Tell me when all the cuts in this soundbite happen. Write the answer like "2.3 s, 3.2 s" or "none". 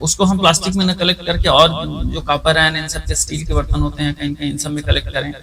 none